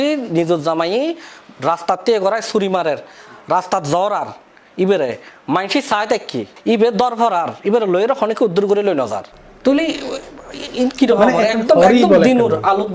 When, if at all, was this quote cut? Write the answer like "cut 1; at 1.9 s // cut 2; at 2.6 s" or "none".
none

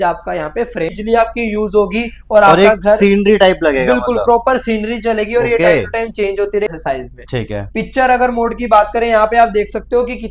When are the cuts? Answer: cut 1; at 0.9 s // cut 2; at 6.8 s

